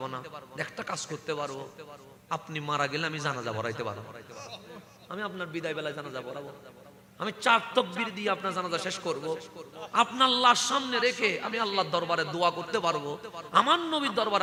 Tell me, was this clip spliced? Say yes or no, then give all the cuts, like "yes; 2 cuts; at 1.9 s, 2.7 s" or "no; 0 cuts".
no; 0 cuts